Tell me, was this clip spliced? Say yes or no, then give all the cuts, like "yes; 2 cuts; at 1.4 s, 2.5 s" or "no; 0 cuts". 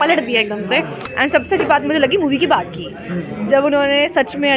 yes; 1 cut; at 1.0 s